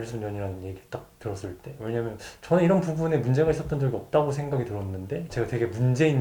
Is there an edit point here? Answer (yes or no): yes